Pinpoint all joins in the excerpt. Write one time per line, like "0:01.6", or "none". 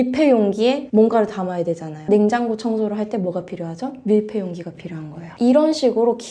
0:02.0